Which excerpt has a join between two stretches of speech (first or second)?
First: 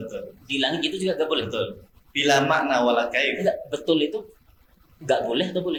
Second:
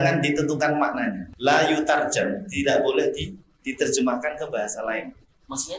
second